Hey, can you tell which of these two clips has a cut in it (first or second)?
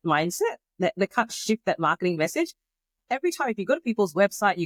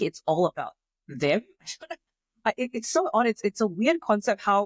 second